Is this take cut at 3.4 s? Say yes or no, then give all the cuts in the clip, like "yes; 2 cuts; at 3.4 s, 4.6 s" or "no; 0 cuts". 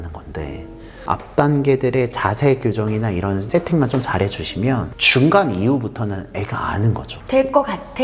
yes; 4 cuts; at 1.1 s, 3.4 s, 5.0 s, 7.1 s